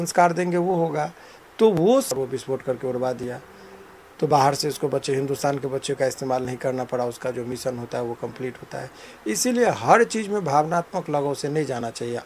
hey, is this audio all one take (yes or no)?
no